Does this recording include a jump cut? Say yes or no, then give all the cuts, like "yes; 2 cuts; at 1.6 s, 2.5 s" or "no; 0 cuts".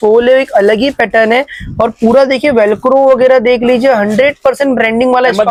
no; 0 cuts